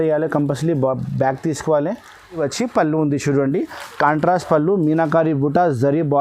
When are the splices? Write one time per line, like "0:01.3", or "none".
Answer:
0:02.4